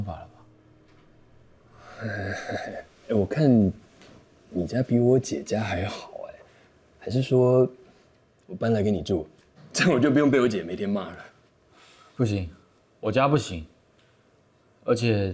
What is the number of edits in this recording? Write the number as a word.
one